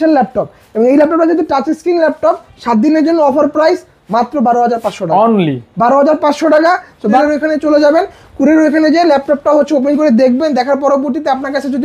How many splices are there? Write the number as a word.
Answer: one